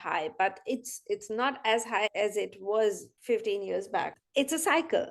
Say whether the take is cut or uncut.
cut